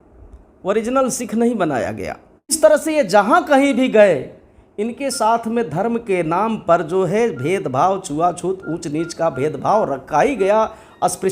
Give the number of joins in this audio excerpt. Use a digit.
1